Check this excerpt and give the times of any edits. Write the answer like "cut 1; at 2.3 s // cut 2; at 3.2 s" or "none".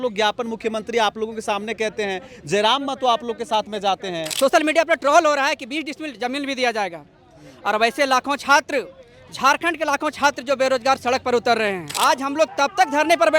cut 1; at 4.2 s // cut 2; at 11.9 s